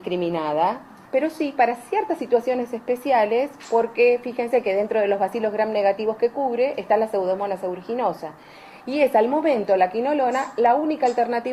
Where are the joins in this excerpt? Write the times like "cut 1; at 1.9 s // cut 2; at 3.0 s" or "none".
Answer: none

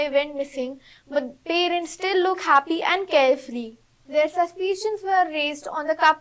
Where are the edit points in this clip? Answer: cut 1; at 4.2 s

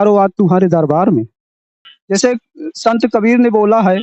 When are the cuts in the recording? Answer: cut 1; at 1.9 s

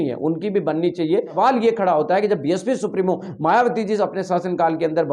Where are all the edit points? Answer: cut 1; at 1.3 s

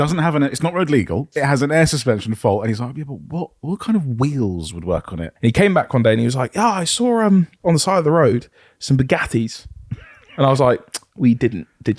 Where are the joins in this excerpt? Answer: cut 1; at 1.3 s // cut 2; at 5.2 s // cut 3; at 7.5 s

